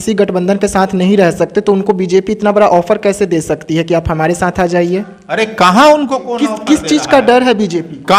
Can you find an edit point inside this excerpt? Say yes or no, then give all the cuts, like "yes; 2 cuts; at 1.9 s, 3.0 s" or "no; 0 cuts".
no; 0 cuts